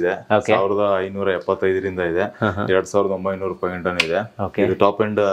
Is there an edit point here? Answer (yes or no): no